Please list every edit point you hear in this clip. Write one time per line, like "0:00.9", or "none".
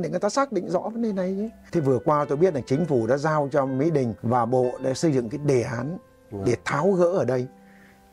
0:01.6
0:04.2